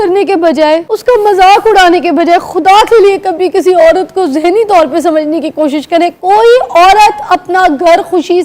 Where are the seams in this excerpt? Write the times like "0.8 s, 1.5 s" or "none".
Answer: 0.9 s